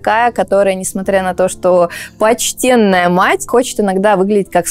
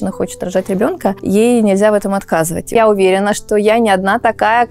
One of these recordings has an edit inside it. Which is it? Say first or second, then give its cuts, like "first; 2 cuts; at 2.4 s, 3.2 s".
second; 2 cuts; at 1.2 s, 2.7 s